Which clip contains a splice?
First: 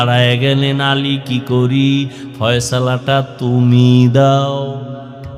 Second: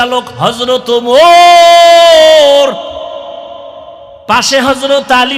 second; 1 cut; at 4.5 s

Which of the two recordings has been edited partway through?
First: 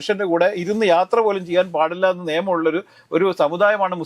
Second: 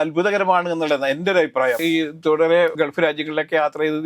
second; 2 cuts; at 1.8 s, 2.7 s

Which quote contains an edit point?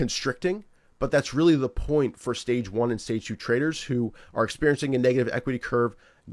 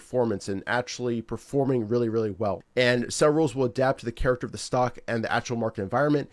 second; 1 cut; at 2.6 s

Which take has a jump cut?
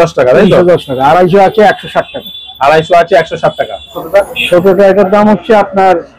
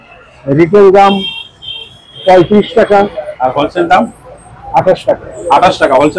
first; 1 cut; at 3.9 s

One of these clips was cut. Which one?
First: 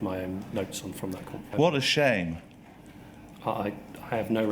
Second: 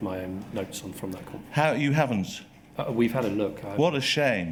first; 2 cuts; at 1.4 s, 3.2 s

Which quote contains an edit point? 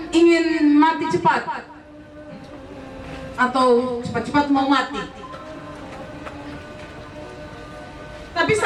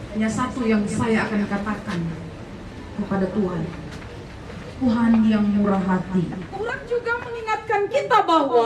second; 1 cut; at 6.8 s

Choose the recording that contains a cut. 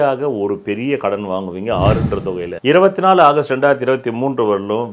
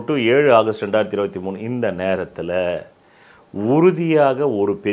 first; 1 cut; at 2.5 s

